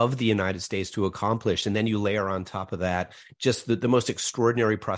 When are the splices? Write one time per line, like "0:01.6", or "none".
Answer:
none